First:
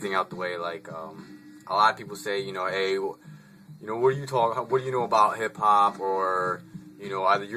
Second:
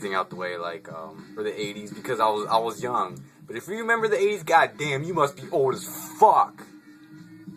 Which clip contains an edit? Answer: first; 1 cut; at 1.3 s

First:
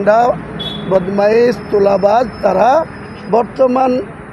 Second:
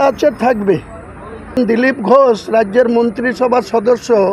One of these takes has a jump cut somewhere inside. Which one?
second; 1 cut; at 1.6 s

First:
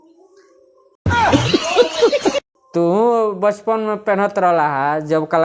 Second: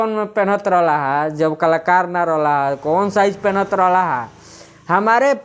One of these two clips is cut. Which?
first; 2 cuts; at 1.0 s, 2.5 s

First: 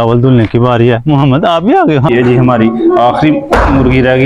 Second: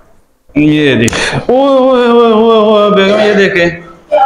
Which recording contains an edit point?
first; 1 cut; at 2.0 s

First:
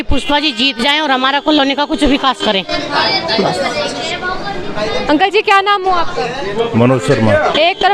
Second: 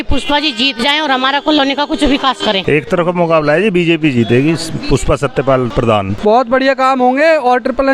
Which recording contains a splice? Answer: second; 2 cuts; at 2.6 s, 6.1 s

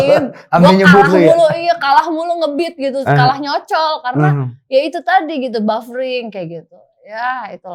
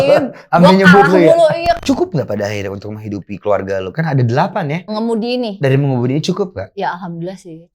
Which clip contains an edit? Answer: second; 2 cuts; at 1.8 s, 4.9 s

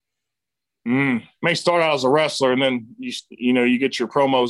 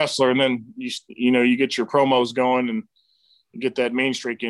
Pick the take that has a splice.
first; 1 cut; at 1.3 s

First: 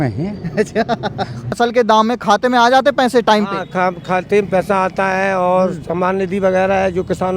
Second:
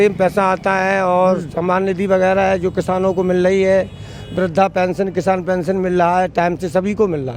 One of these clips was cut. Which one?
first; 1 cut; at 1.6 s

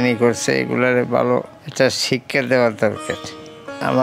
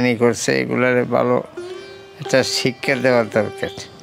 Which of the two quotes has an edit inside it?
first; 1 cut; at 1.6 s

